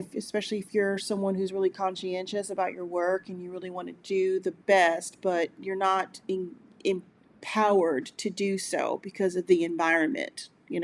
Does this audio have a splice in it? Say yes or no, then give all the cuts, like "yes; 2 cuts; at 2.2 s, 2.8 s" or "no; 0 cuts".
no; 0 cuts